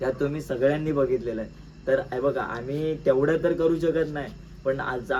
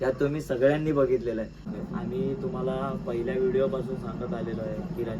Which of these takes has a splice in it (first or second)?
second